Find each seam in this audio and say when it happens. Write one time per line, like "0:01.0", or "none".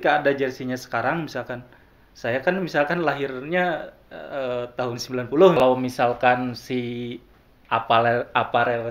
0:05.6

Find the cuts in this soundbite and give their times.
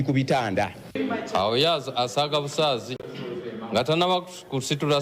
0:00.9

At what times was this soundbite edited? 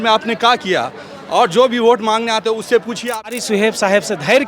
0:03.3

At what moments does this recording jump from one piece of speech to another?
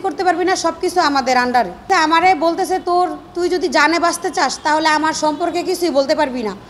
0:01.9

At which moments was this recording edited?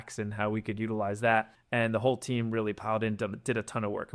0:01.6

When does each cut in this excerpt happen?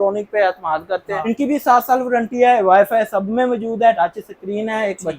0:01.2
0:04.0

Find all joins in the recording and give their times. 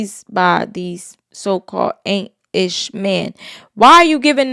none

